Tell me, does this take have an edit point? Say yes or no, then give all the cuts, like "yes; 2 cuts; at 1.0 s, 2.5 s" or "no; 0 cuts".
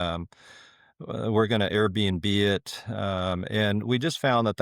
no; 0 cuts